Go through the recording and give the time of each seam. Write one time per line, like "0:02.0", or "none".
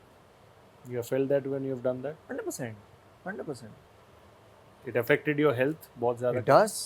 0:03.8